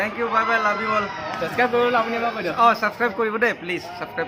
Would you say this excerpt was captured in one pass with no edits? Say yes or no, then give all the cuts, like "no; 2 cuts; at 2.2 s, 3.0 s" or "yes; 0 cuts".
yes; 0 cuts